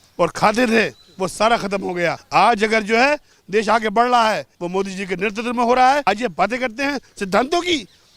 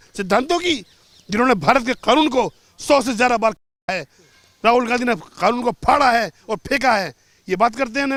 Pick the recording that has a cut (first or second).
first